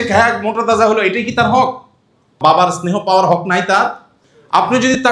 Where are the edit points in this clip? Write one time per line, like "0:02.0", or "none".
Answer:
none